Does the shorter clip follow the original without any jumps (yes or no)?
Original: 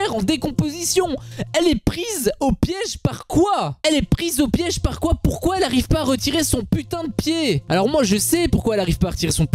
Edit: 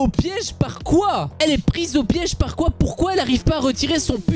yes